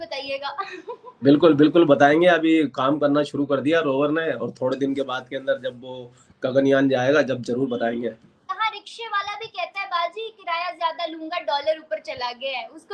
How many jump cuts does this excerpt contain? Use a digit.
1